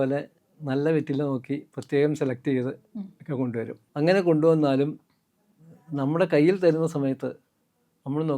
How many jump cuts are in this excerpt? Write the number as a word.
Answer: one